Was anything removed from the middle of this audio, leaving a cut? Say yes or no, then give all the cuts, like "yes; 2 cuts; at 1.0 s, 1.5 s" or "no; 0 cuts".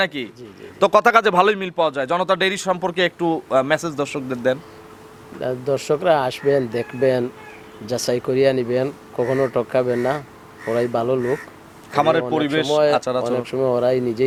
no; 0 cuts